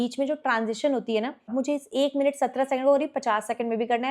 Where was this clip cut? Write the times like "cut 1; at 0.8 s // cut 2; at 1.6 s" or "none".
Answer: cut 1; at 1.5 s